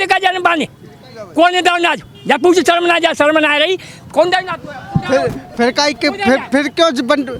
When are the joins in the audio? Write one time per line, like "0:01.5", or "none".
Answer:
none